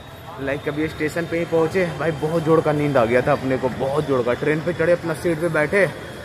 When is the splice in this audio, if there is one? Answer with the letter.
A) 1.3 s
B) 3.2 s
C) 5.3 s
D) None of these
D